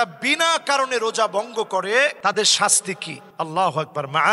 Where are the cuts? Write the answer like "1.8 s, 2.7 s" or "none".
none